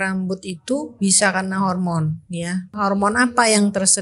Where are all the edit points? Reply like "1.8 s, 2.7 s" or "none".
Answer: 2.7 s